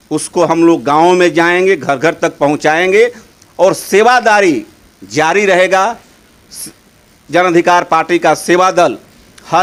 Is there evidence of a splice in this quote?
no; 0 cuts

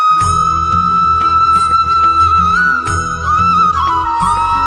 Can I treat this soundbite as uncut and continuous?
no; 1 cut; at 3.7 s

